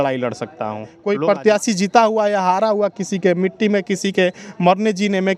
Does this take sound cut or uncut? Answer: cut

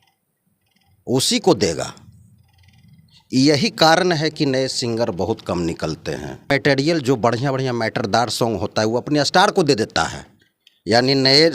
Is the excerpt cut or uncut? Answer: cut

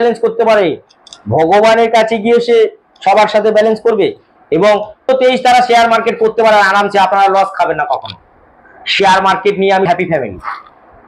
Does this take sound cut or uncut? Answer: cut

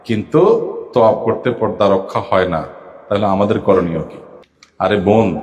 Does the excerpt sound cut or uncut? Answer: uncut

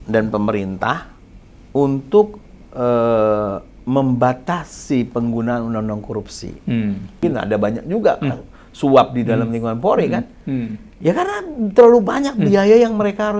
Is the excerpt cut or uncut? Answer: cut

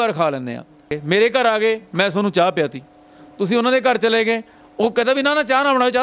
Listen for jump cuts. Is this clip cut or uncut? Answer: cut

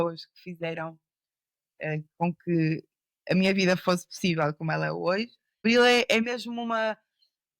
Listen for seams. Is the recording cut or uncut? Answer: cut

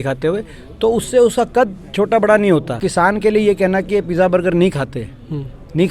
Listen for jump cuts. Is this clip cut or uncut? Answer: cut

